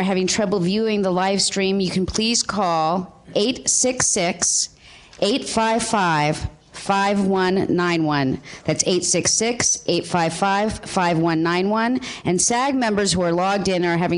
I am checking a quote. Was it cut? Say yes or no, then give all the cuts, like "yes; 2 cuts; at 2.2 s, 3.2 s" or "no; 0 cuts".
no; 0 cuts